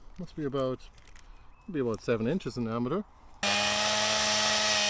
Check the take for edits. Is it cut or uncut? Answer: cut